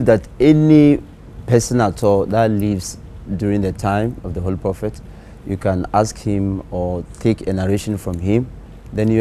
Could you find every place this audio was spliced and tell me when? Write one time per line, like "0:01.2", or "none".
none